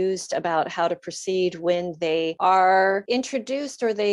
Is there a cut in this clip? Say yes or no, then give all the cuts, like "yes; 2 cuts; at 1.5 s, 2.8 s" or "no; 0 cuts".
yes; 2 cuts; at 2.3 s, 3.0 s